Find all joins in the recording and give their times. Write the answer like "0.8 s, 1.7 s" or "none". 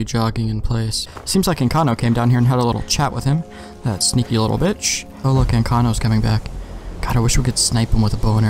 1.0 s, 5.2 s

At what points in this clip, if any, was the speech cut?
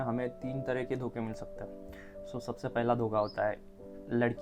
none

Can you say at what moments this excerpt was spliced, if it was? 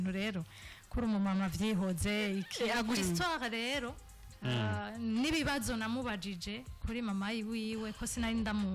3.0 s

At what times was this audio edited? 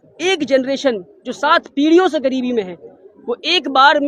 none

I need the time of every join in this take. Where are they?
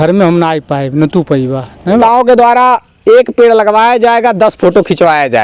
2.0 s

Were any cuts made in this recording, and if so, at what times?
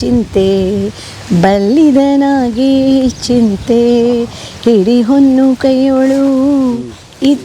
none

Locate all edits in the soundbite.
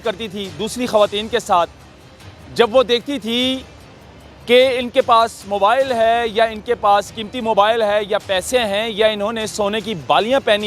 none

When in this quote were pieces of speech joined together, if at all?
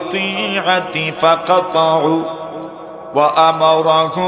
none

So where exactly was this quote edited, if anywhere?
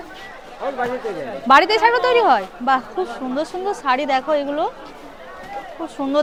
none

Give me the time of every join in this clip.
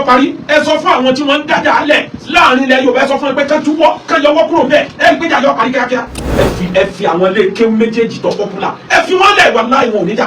6.2 s

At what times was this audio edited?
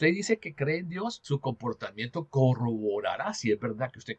1.2 s

